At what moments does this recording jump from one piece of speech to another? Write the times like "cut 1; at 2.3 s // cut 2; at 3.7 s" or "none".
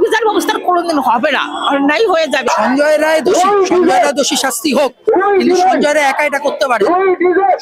cut 1; at 2.5 s